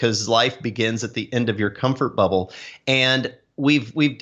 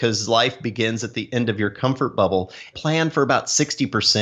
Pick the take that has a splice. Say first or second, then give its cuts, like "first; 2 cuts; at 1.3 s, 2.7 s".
second; 1 cut; at 2.8 s